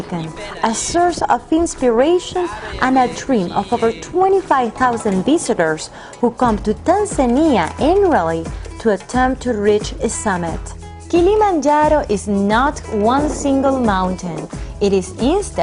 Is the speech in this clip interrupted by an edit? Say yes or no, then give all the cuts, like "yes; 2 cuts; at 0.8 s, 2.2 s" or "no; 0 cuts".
yes; 1 cut; at 7.7 s